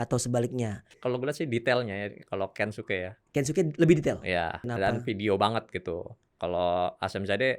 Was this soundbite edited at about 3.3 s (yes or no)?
no